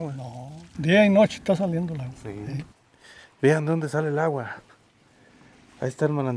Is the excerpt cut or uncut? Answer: cut